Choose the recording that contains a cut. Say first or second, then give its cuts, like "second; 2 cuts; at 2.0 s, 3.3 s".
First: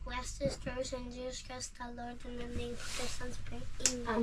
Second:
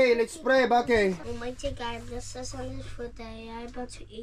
second; 1 cut; at 1.2 s